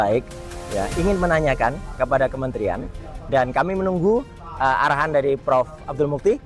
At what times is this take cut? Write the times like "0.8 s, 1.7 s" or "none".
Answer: none